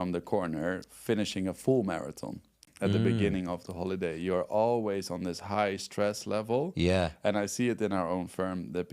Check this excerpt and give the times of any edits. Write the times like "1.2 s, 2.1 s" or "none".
2.5 s